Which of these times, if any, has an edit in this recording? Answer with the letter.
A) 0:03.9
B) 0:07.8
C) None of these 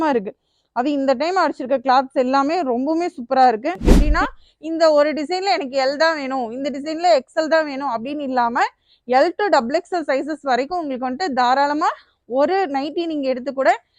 A